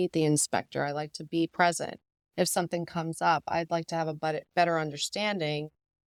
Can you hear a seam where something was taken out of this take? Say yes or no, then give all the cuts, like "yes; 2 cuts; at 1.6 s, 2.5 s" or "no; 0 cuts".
no; 0 cuts